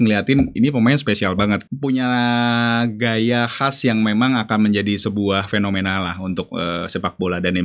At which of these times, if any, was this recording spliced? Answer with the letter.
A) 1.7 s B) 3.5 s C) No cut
A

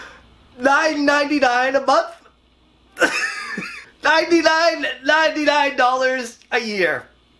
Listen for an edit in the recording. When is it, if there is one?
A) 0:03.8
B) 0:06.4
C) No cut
A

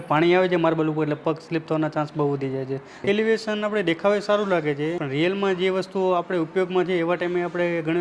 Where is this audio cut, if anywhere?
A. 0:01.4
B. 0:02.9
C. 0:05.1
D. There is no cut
B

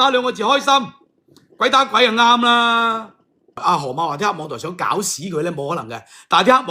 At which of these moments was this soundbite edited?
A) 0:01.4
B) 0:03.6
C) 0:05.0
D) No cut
B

